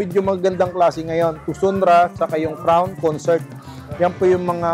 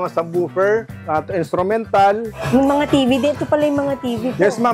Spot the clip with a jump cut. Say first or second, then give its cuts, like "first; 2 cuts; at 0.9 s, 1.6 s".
second; 2 cuts; at 1.0 s, 2.3 s